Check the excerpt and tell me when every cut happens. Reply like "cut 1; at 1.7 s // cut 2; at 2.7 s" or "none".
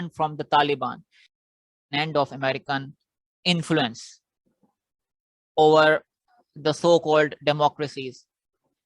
cut 1; at 1.5 s

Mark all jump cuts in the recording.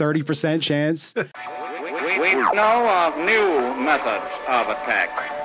cut 1; at 1.3 s

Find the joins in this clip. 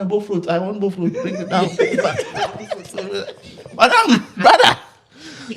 none

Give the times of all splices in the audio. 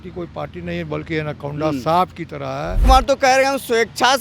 cut 1; at 2.8 s

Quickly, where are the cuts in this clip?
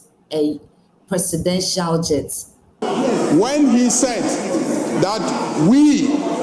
cut 1; at 2.8 s

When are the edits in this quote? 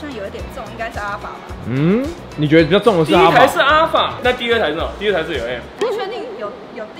none

